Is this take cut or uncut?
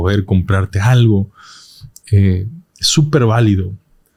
uncut